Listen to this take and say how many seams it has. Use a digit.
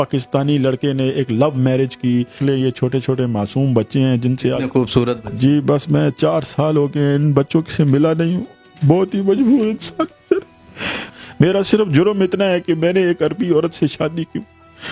2